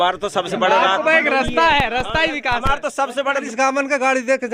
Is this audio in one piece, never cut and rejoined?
no; 1 cut; at 3.5 s

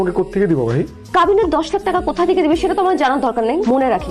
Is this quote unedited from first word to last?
yes; 0 cuts

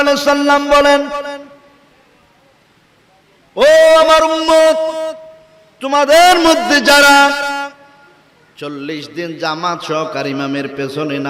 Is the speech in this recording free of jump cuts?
yes; 0 cuts

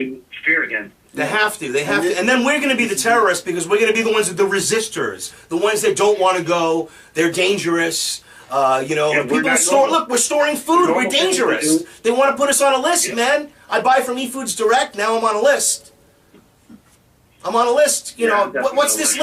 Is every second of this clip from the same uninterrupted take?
no; 1 cut; at 6.9 s

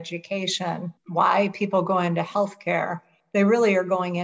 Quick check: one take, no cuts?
no; 1 cut; at 1.0 s

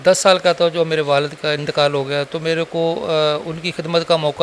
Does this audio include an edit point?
no; 0 cuts

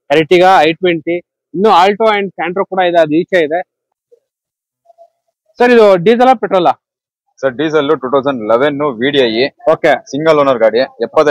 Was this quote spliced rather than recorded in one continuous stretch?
yes; 1 cut; at 3.8 s

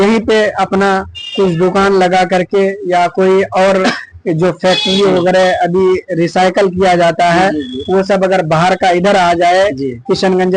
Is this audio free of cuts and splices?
yes; 0 cuts

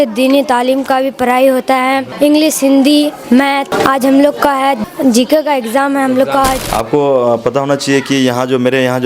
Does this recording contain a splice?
yes; 4 cuts; at 2.1 s, 3.4 s, 4.8 s, 6.6 s

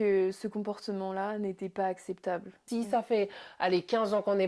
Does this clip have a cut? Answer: yes; 1 cut; at 2.6 s

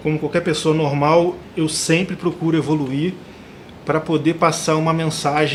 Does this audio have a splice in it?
no; 0 cuts

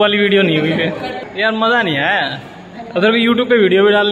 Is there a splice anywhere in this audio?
no; 0 cuts

